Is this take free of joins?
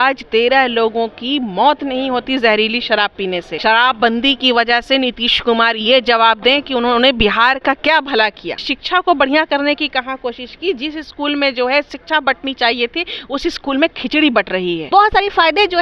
no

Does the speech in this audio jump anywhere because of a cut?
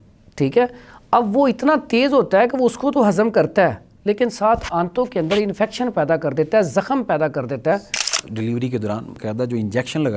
yes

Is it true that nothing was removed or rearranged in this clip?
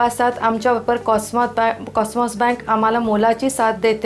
yes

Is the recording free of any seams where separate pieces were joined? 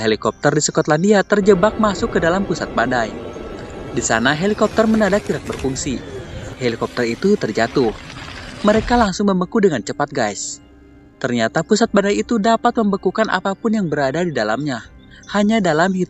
yes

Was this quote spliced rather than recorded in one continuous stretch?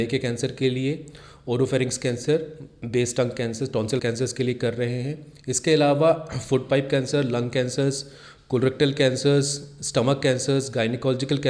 no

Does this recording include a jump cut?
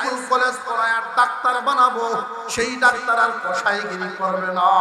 no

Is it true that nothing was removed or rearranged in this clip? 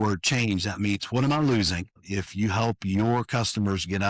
no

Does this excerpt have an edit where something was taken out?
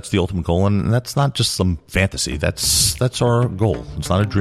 no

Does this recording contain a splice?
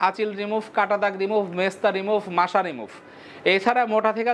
no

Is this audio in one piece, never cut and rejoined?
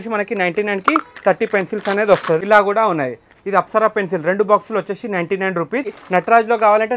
no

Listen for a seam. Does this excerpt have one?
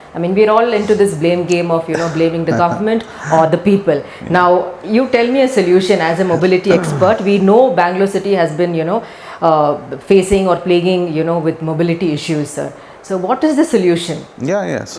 no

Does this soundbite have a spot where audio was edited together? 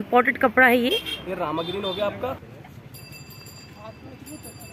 yes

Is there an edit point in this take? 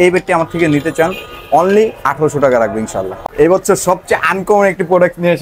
yes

